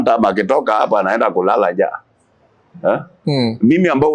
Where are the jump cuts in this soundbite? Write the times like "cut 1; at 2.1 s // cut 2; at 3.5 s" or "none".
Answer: none